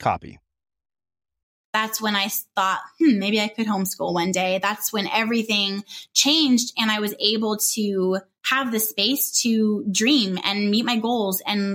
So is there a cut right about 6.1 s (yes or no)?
no